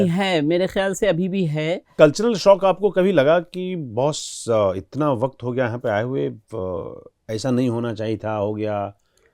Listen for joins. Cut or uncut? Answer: cut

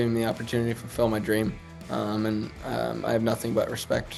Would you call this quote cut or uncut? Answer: uncut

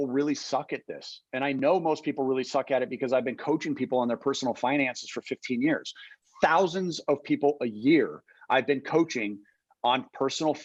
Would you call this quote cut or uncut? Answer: uncut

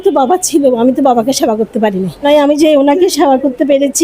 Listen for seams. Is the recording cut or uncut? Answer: cut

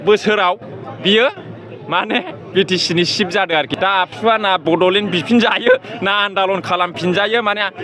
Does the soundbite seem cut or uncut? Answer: cut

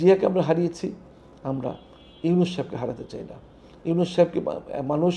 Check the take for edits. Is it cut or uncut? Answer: uncut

